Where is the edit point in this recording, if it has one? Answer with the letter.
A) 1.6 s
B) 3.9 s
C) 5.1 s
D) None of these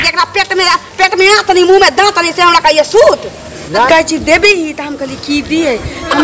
B